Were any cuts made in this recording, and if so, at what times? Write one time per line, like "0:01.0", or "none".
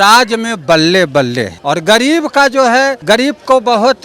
0:01.5
0:03.0